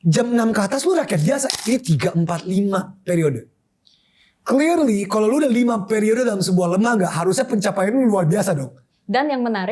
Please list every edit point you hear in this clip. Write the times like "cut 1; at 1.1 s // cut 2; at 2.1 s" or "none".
cut 1; at 1.5 s